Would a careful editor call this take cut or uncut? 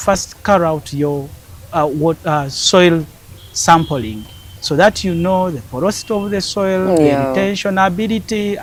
uncut